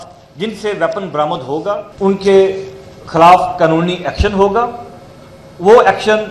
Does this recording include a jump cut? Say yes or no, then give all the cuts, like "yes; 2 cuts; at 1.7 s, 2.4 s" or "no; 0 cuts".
yes; 1 cut; at 1.9 s